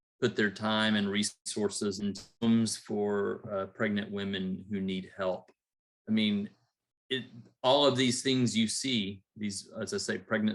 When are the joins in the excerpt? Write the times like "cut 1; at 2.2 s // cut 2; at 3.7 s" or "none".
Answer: cut 1; at 1.4 s // cut 2; at 2.3 s